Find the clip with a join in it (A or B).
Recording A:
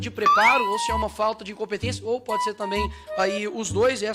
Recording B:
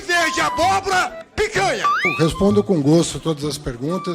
B